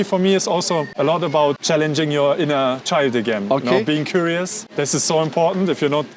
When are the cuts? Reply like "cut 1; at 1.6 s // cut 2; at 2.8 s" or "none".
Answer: cut 1; at 0.9 s // cut 2; at 1.6 s // cut 3; at 4.6 s